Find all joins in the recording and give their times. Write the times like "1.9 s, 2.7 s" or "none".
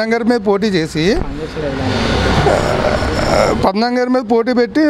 none